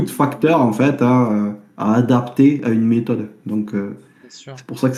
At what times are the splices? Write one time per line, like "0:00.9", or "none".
none